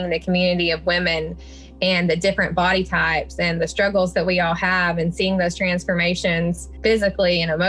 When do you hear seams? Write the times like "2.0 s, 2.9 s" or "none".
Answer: none